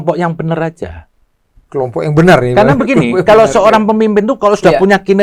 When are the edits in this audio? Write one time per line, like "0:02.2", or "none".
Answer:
none